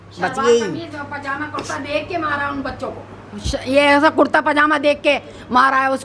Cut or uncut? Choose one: uncut